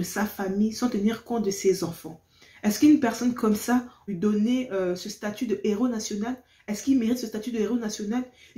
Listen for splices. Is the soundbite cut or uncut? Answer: cut